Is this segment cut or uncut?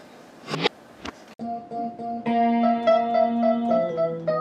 cut